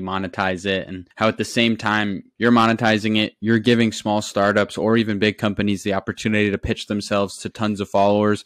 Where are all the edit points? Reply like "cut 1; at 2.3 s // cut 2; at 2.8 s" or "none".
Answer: none

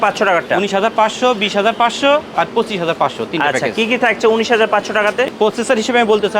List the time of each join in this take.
cut 1; at 5.3 s

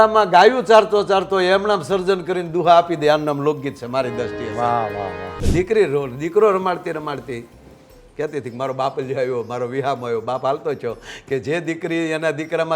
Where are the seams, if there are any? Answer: cut 1; at 5.4 s

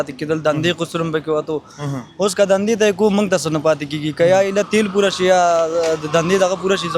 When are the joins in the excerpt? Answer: none

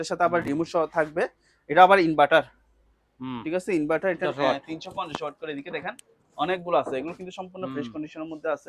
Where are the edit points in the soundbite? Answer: cut 1; at 4.2 s

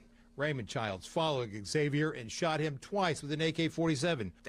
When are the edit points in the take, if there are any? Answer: none

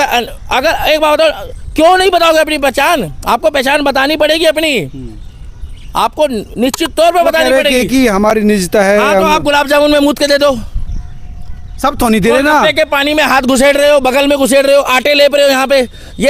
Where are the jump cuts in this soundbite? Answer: none

